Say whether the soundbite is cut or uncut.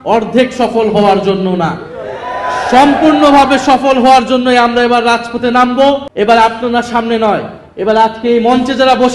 cut